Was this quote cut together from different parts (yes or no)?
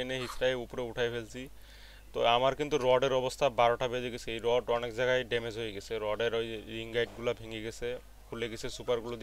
no